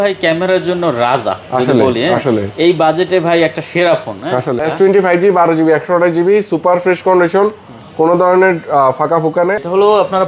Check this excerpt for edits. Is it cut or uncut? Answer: cut